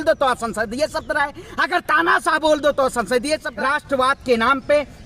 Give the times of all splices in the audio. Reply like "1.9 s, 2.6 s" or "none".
3.5 s